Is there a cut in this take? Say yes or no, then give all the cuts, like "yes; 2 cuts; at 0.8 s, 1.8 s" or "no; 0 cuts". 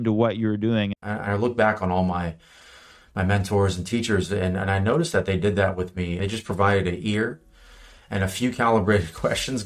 yes; 2 cuts; at 0.9 s, 6.1 s